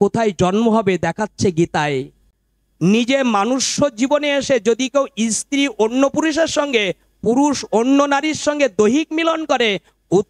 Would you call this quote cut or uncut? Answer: cut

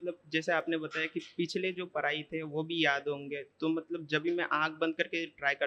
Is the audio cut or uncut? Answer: uncut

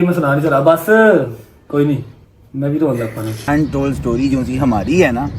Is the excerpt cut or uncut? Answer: cut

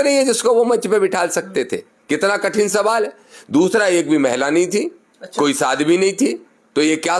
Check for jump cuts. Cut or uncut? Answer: uncut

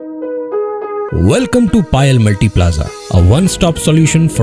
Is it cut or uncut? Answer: uncut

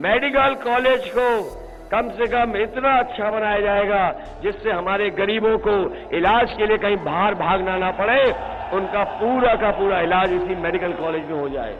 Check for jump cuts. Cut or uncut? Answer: uncut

